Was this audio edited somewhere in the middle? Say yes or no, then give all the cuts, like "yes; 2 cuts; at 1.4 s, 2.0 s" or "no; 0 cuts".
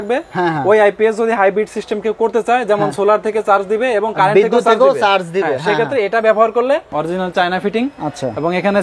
yes; 1 cut; at 6.9 s